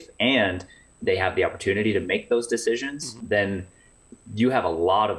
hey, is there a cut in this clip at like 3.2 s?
yes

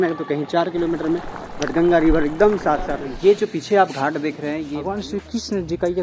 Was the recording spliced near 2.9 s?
yes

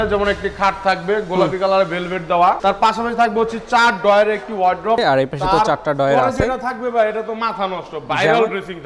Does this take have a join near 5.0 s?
yes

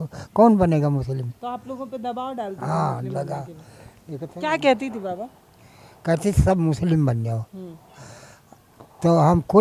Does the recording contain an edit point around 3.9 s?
no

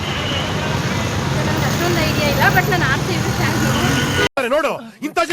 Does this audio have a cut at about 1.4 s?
no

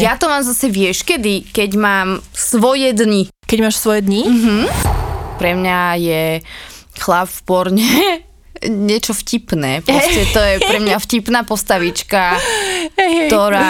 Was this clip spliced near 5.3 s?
yes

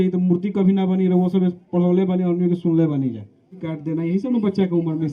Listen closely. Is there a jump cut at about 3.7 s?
yes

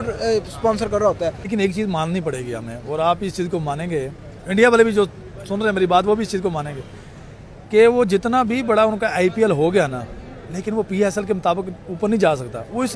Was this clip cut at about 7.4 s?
no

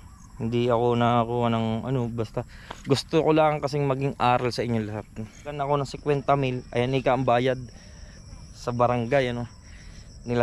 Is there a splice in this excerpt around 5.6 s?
yes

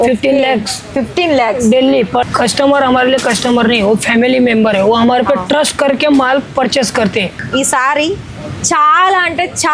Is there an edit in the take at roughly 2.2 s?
yes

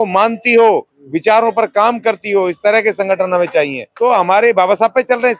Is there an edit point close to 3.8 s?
yes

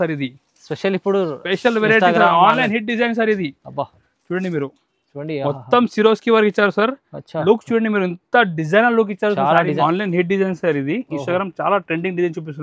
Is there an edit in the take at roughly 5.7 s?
no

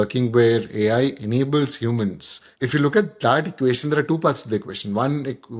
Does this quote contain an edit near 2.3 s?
no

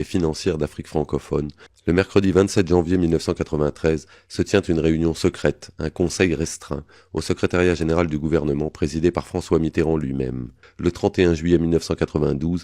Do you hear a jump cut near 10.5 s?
yes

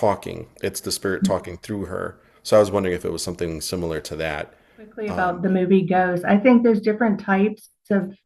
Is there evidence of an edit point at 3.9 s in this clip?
no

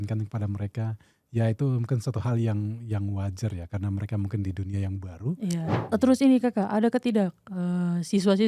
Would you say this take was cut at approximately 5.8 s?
yes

